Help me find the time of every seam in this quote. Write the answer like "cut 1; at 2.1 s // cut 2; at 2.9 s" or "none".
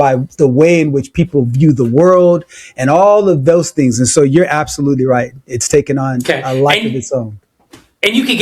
none